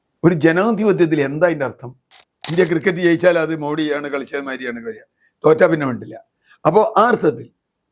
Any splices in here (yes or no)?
yes